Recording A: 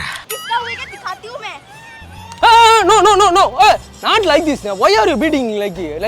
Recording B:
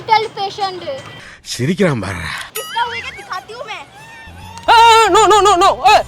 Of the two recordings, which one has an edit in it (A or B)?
B